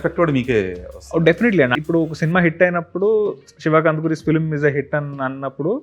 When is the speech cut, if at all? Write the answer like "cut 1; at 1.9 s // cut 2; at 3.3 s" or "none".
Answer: cut 1; at 1.8 s